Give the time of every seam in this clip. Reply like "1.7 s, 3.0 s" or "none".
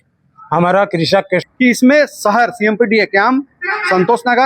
1.4 s